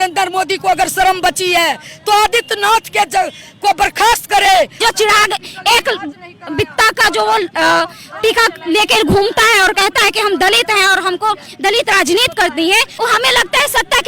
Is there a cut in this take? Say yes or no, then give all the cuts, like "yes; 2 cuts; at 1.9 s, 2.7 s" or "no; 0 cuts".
yes; 2 cuts; at 4.8 s, 12.9 s